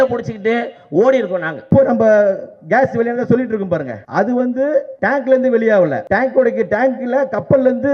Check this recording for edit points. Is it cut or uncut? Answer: cut